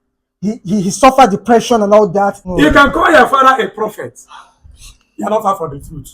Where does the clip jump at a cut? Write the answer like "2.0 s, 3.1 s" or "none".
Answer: 2.4 s